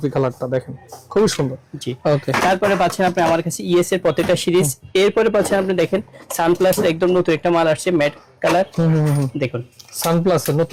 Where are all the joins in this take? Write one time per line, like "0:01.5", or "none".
none